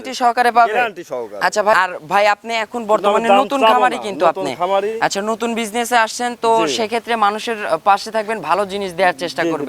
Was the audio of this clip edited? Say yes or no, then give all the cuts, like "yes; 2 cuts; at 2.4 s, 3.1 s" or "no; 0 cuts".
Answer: yes; 1 cut; at 1.7 s